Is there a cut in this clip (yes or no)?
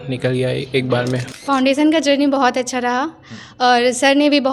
yes